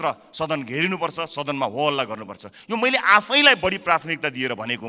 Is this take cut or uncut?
uncut